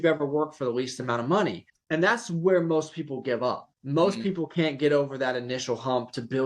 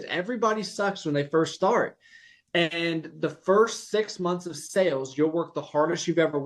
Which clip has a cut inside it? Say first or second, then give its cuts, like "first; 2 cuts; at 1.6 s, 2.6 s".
first; 2 cuts; at 1.7 s, 3.7 s